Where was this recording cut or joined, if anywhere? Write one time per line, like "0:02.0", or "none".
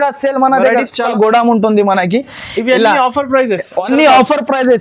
0:01.1